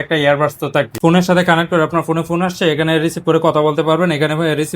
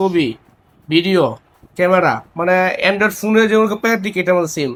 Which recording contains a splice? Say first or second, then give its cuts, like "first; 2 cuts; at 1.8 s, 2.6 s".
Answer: first; 1 cut; at 0.9 s